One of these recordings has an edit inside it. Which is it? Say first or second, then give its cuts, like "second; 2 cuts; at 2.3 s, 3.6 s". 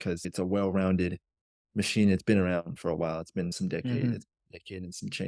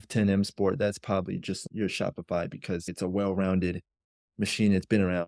second; 1 cut; at 1.6 s